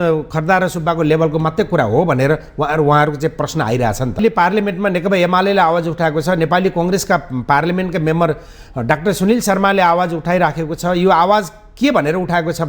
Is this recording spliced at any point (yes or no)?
yes